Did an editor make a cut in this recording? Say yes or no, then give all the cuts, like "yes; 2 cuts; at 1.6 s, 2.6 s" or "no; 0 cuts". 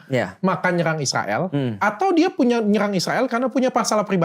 no; 0 cuts